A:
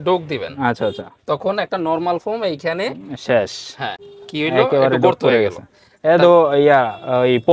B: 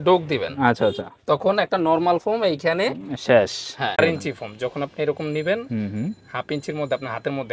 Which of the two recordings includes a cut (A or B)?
B